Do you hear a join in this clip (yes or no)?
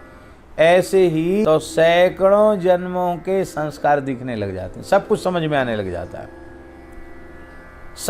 yes